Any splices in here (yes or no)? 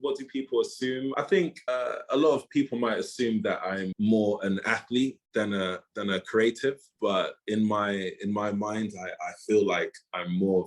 yes